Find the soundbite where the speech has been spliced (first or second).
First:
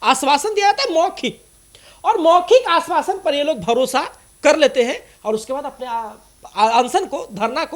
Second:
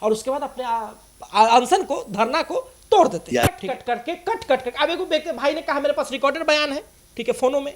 second